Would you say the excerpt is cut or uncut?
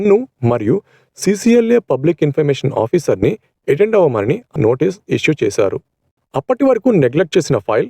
cut